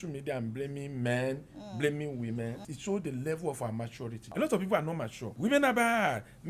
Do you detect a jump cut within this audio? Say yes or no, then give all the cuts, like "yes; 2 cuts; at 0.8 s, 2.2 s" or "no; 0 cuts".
yes; 3 cuts; at 2.7 s, 4.3 s, 5.2 s